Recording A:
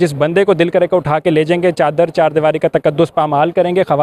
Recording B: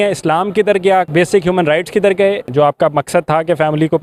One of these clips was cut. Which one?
B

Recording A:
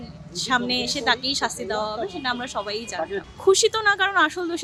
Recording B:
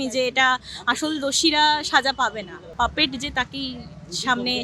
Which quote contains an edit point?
B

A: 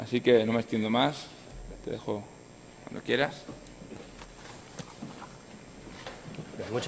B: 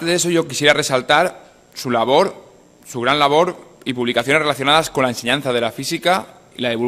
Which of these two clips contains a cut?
B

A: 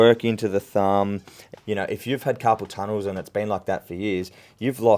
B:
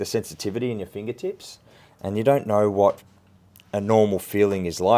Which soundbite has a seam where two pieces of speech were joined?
A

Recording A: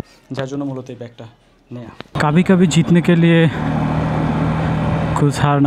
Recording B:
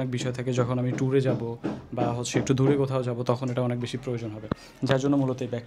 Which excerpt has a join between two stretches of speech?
A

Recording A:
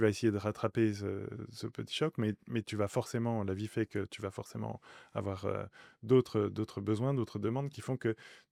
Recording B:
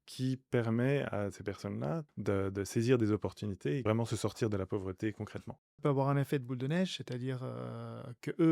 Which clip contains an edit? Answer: B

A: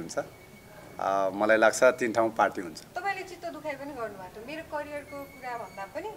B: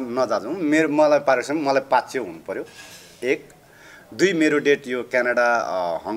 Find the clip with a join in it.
A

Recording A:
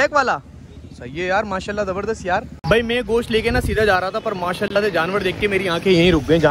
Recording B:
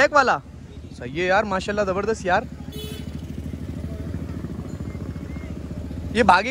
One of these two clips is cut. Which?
A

